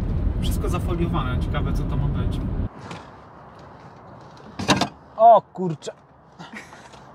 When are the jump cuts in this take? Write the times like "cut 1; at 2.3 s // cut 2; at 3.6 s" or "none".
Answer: cut 1; at 2.7 s

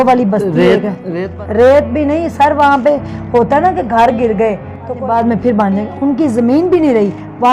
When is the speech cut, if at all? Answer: cut 1; at 1.2 s // cut 2; at 5.0 s

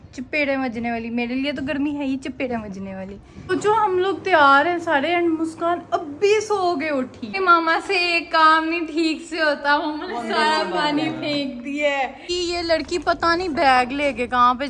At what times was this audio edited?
cut 1; at 3.5 s // cut 2; at 7.3 s // cut 3; at 12.2 s

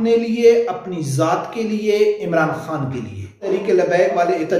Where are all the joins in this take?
cut 1; at 3.4 s

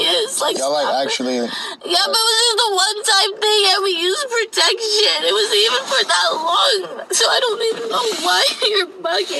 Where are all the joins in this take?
none

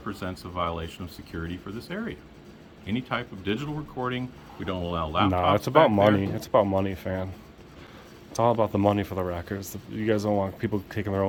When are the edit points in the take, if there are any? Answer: none

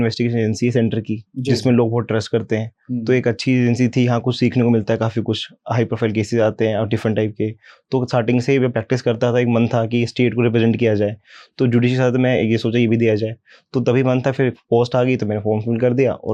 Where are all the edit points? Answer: none

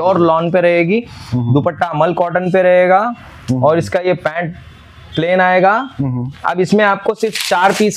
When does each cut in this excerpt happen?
none

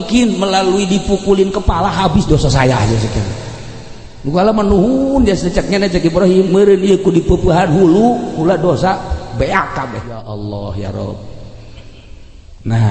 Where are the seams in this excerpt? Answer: cut 1; at 10.2 s

